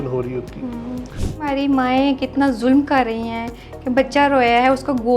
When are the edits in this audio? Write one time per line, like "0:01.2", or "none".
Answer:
0:01.2